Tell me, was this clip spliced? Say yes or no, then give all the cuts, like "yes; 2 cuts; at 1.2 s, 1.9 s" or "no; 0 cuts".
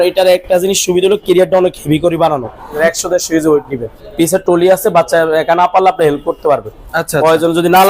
yes; 2 cuts; at 2.8 s, 4.0 s